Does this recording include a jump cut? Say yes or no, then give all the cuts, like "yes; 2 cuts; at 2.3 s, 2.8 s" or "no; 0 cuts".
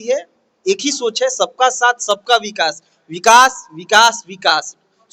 no; 0 cuts